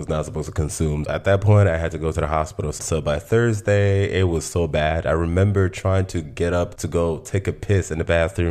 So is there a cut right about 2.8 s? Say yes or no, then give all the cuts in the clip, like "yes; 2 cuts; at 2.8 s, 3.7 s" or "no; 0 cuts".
yes; 1 cut; at 2.8 s